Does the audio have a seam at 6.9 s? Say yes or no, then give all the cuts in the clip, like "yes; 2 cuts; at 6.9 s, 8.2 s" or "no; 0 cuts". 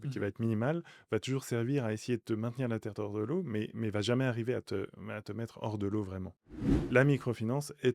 yes; 1 cut; at 6.9 s